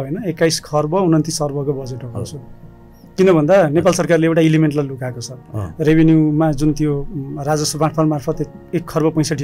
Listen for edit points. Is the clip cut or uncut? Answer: uncut